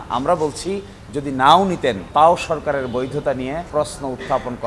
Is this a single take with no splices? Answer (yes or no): no